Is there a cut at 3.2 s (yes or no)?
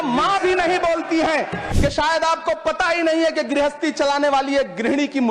no